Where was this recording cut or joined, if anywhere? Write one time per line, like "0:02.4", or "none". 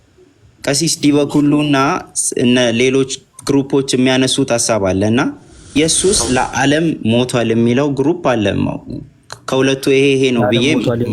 0:05.7